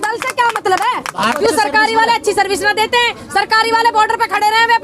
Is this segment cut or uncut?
cut